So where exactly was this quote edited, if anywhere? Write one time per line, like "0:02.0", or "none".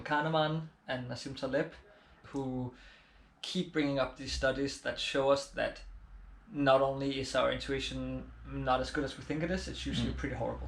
0:02.1